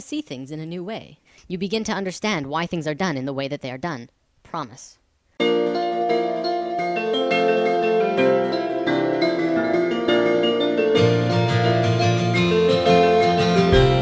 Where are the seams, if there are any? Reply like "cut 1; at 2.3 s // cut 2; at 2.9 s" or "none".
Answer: cut 1; at 2.8 s